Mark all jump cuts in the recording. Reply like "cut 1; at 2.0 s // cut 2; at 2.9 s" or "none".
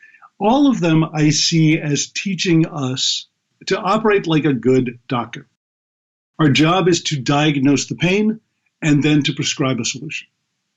cut 1; at 3.5 s // cut 2; at 5.7 s